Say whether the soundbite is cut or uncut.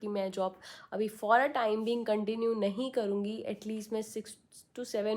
uncut